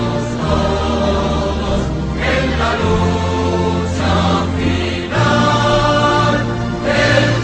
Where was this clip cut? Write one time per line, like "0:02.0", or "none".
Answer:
0:04.6